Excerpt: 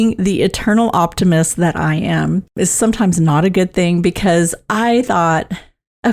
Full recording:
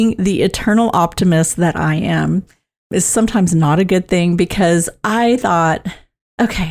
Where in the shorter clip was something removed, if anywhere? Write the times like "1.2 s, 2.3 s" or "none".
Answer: 2.5 s

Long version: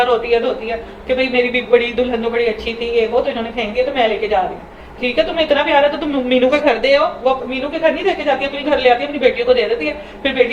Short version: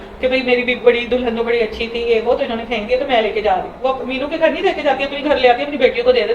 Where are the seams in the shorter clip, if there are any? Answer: 3.8 s

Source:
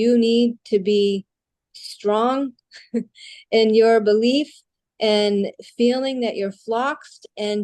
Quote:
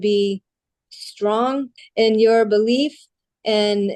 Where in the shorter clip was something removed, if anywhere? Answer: 1.8 s

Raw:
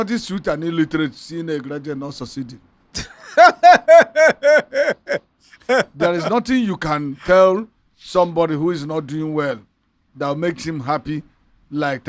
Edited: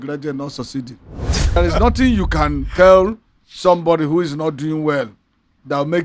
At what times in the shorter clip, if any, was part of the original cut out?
1.6 s

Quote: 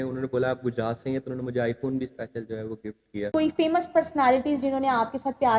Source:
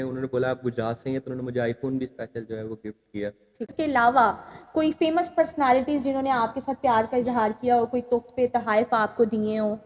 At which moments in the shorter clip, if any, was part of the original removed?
3.1 s

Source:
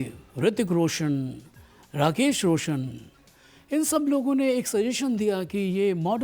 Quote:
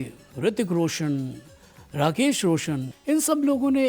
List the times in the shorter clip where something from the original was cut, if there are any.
2.9 s

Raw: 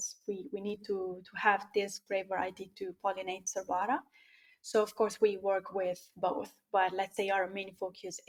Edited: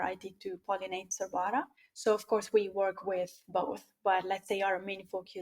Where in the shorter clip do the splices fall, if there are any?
1.8 s

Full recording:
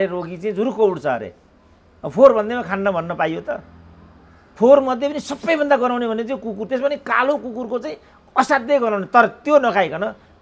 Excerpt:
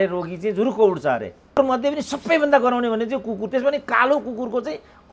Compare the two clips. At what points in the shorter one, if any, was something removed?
1.6 s

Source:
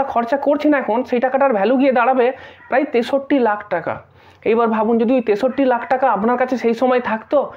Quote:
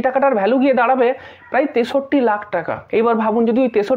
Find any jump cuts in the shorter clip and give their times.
2.8 s

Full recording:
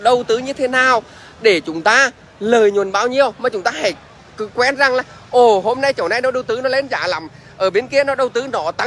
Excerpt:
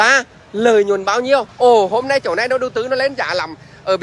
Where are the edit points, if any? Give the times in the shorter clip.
1.5 s

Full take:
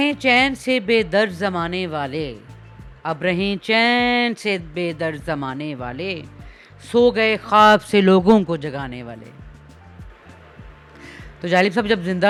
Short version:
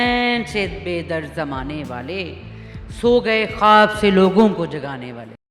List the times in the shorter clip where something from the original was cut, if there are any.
none

